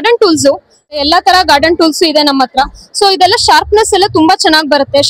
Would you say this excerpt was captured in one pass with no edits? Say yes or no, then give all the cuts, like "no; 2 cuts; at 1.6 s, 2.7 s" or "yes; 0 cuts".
no; 1 cut; at 1.0 s